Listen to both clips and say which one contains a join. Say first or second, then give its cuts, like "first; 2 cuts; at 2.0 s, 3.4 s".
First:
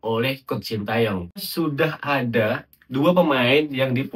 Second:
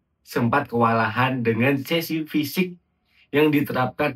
first; 1 cut; at 1.5 s